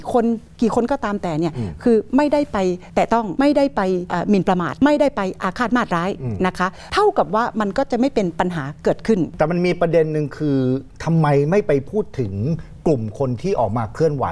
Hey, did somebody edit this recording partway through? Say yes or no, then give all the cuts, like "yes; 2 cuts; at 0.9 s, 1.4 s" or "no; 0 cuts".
yes; 4 cuts; at 3.1 s, 4.4 s, 6.8 s, 9.3 s